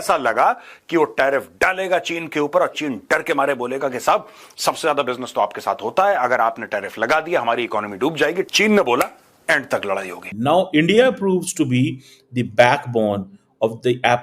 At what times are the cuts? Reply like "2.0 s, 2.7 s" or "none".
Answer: 10.2 s

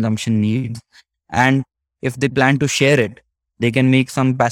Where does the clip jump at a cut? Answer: none

